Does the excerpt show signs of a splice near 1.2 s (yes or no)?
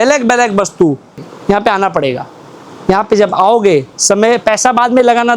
yes